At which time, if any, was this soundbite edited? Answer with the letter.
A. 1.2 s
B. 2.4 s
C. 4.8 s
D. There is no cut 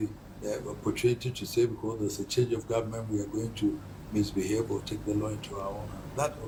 D